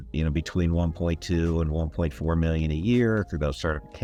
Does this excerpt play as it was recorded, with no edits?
yes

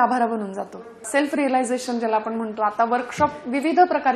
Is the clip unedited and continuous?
no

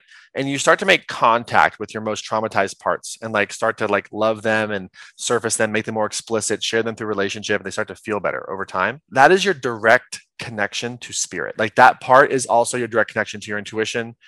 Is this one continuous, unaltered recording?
no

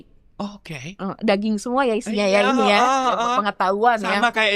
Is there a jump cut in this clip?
no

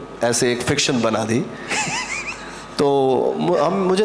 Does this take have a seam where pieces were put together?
no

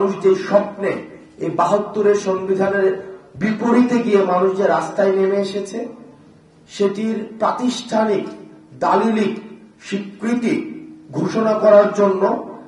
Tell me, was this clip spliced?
no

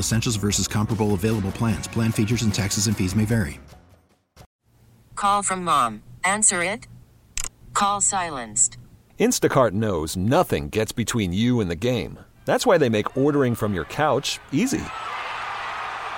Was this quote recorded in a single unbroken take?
no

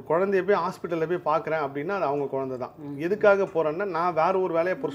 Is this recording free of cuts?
yes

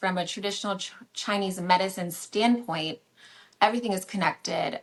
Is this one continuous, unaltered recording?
yes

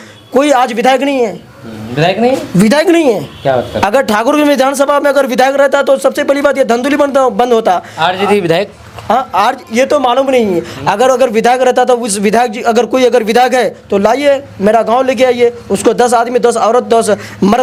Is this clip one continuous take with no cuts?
yes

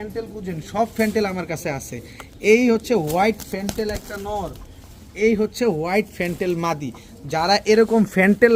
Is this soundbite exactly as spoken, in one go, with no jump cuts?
yes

